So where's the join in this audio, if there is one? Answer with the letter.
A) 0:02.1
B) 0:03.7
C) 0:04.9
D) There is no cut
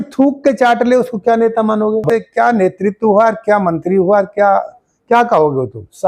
A